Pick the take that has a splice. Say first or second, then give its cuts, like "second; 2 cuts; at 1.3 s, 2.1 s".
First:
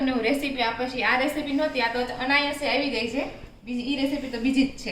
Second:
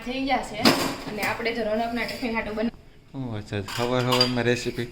second; 1 cut; at 2.7 s